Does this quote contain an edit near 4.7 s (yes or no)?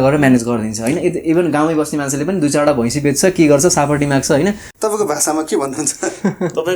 yes